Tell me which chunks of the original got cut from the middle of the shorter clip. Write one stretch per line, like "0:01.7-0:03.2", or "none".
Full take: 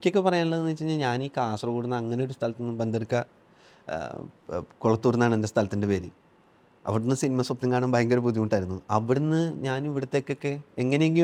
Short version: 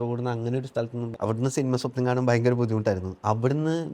0:02.7-0:06.7